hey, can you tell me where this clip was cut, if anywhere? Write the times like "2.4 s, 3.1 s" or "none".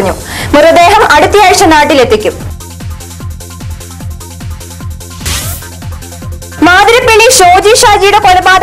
5.3 s